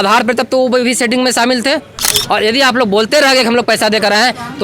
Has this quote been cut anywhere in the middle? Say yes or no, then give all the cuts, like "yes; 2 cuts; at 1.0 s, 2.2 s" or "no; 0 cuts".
yes; 1 cut; at 2.1 s